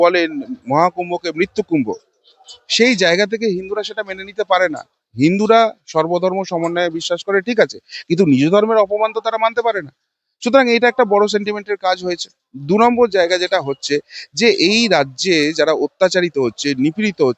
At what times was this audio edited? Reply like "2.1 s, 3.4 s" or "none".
none